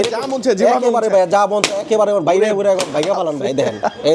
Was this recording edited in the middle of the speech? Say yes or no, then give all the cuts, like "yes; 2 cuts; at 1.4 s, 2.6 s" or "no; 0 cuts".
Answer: no; 0 cuts